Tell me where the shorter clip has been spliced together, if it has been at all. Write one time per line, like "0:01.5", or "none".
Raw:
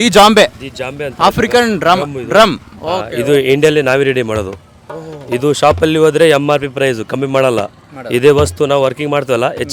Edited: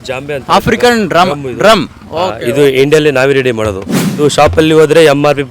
0:04.2